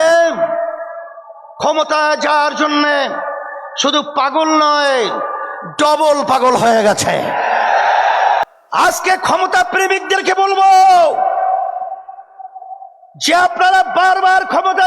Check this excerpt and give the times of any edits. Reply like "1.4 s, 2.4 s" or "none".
8.4 s